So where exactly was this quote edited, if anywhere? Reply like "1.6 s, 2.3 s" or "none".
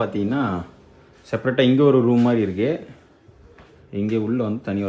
none